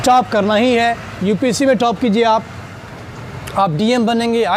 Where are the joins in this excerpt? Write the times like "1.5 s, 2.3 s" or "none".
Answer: none